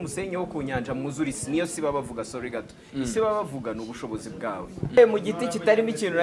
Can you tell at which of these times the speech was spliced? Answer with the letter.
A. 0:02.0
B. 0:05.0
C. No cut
B